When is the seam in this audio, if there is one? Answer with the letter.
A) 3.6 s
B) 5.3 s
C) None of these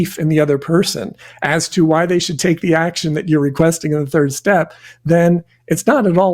A